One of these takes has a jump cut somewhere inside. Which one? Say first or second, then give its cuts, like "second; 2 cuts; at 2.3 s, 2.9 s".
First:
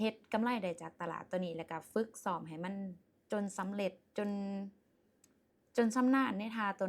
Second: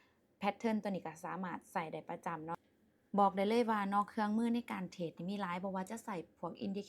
second; 1 cut; at 2.7 s